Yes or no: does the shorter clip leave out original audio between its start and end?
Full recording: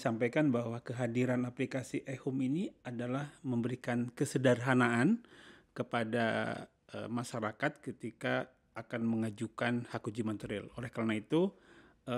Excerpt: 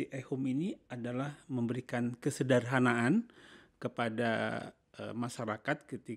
no